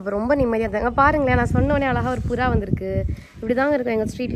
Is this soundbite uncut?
yes; 0 cuts

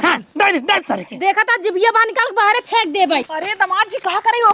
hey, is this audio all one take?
no; 1 cut; at 3.3 s

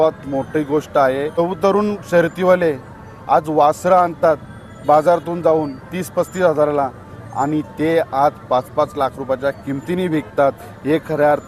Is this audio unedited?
no; 1 cut; at 1.4 s

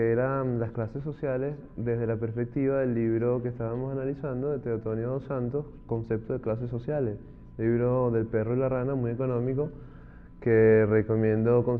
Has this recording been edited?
no; 0 cuts

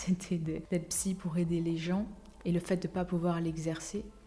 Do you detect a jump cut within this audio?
yes; 1 cut; at 2.2 s

